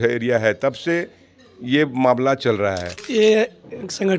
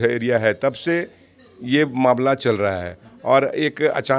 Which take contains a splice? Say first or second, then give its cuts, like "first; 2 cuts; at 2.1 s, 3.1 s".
first; 1 cut; at 2.9 s